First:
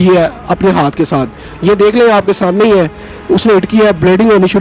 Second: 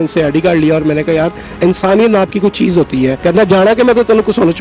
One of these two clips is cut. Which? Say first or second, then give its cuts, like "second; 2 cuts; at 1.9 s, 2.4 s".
second; 1 cut; at 3.2 s